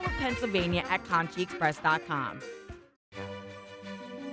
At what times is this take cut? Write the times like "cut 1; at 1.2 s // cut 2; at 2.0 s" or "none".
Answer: cut 1; at 2.7 s